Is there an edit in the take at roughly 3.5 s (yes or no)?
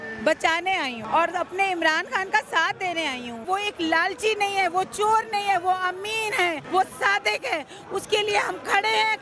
yes